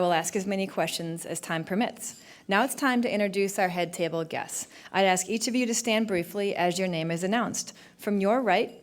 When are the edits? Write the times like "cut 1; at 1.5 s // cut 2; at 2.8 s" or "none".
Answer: cut 1; at 5.2 s